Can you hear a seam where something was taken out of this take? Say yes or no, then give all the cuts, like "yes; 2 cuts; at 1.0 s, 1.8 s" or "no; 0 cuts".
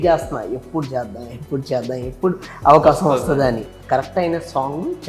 yes; 1 cut; at 3.7 s